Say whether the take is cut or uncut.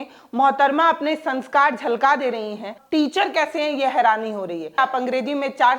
cut